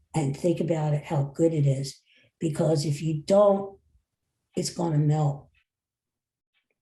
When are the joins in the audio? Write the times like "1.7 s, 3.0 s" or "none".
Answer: none